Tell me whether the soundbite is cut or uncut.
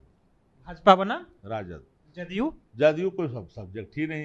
uncut